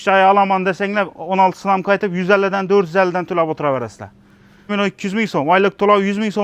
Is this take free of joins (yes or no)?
no